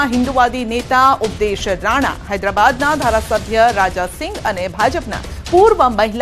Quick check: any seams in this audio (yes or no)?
no